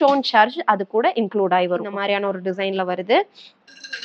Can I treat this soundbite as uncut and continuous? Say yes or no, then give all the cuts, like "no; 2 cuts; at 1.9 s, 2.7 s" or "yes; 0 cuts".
no; 1 cut; at 1.9 s